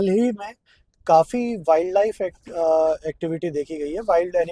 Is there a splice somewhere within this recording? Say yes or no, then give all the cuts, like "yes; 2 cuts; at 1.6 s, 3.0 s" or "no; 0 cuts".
no; 0 cuts